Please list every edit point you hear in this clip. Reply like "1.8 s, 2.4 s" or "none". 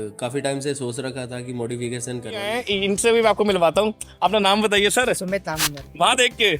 2.6 s